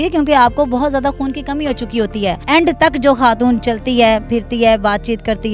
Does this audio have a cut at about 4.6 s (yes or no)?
no